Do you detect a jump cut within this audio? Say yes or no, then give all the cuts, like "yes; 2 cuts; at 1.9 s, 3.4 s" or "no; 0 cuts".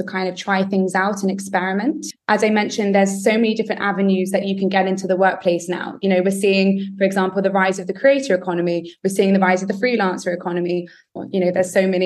yes; 2 cuts; at 2.0 s, 11.2 s